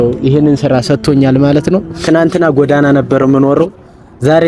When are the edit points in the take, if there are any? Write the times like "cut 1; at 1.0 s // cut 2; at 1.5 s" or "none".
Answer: cut 1; at 2.0 s